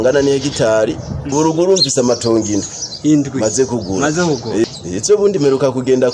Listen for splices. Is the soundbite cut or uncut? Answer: cut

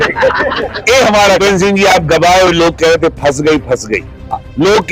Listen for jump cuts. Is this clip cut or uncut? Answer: cut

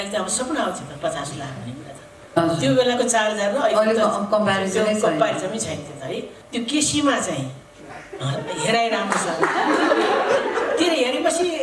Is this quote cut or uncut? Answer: cut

